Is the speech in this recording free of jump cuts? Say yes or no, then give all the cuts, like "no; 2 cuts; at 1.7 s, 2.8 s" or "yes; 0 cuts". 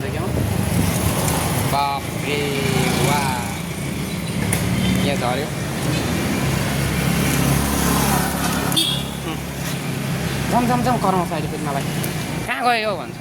yes; 0 cuts